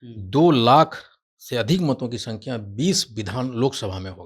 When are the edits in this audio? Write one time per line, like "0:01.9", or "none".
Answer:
none